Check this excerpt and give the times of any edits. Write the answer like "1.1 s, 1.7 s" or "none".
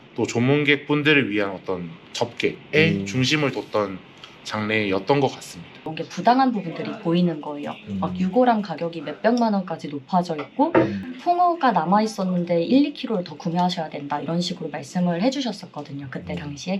5.8 s